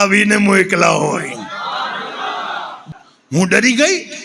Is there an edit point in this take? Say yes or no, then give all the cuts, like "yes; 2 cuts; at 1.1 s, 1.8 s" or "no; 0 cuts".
yes; 1 cut; at 2.8 s